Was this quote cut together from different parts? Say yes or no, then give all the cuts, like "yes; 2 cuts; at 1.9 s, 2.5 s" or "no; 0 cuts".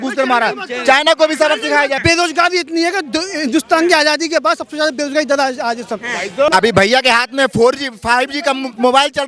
yes; 2 cuts; at 2.0 s, 6.5 s